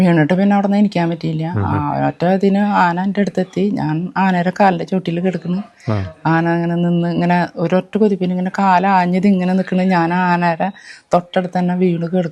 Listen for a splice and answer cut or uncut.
uncut